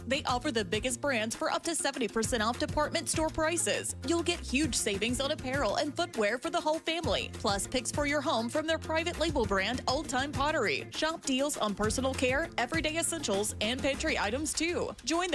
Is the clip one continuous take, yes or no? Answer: yes